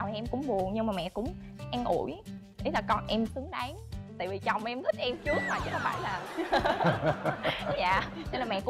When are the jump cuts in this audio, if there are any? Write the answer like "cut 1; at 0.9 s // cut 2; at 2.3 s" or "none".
none

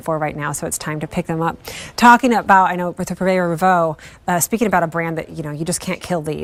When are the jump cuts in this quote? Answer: none

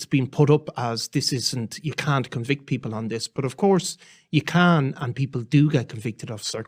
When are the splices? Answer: none

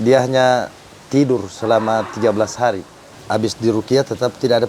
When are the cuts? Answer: cut 1; at 3.1 s

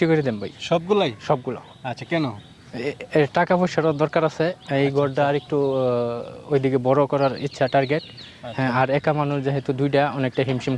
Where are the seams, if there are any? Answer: none

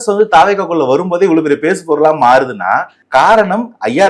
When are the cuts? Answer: cut 1; at 2.9 s

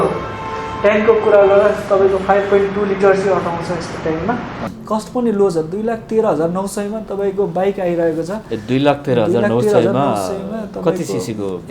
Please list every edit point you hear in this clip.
cut 1; at 4.6 s

